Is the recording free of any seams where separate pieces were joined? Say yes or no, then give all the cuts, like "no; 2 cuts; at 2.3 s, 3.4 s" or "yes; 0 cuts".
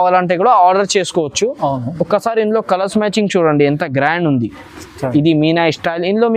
yes; 0 cuts